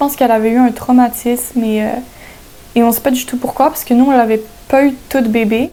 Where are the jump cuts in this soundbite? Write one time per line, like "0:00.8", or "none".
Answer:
none